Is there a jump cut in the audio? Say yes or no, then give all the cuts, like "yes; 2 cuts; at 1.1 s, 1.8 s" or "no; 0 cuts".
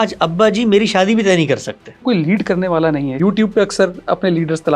yes; 2 cuts; at 2.0 s, 3.2 s